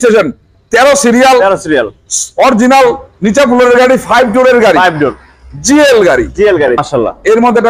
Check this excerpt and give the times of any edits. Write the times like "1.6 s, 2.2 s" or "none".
6.8 s